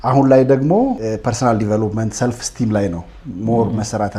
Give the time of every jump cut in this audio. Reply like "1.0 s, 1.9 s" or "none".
1.0 s